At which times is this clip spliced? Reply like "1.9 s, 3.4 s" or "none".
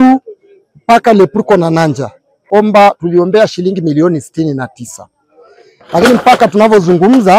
2.4 s